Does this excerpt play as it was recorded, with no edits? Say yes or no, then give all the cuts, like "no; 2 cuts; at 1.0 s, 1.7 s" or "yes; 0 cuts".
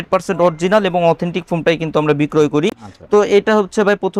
yes; 0 cuts